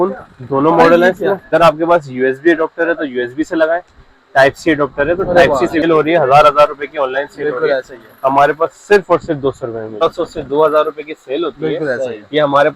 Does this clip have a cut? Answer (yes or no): yes